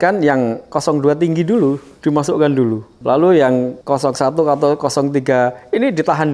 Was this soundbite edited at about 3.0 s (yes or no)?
yes